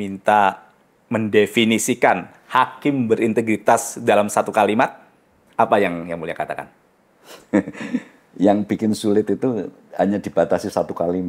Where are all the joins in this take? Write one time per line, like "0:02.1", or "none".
none